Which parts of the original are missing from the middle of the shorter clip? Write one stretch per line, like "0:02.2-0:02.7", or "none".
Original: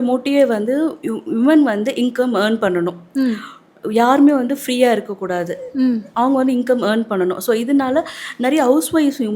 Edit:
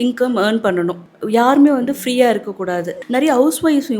0:03.0-0:03.7
0:05.6-0:08.2